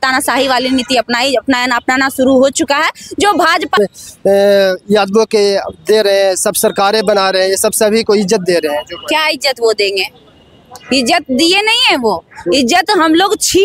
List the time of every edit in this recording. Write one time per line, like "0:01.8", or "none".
0:03.8